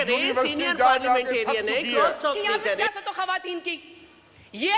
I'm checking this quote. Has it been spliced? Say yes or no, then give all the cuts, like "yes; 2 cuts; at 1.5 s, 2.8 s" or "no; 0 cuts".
yes; 1 cut; at 2.8 s